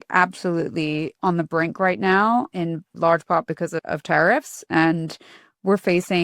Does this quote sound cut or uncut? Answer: cut